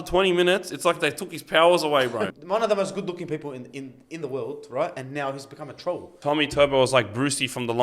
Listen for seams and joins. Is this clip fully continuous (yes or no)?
no